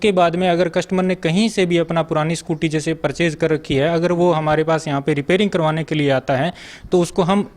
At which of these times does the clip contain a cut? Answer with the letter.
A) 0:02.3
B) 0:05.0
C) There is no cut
C